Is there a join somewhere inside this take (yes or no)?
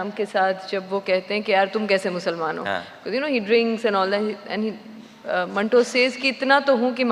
no